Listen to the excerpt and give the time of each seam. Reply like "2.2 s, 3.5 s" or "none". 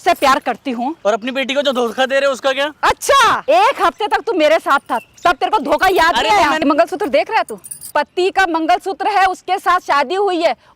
1.0 s, 3.4 s, 6.6 s, 7.9 s